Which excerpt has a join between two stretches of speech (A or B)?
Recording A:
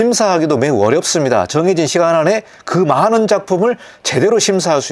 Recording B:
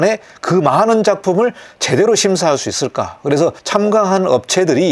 B